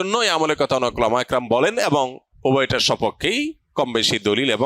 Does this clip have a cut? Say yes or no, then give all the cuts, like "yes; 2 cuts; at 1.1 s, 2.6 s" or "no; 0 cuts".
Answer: yes; 1 cut; at 2.2 s